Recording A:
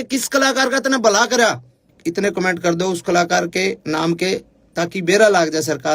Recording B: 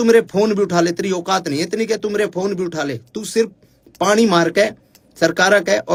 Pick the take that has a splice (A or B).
A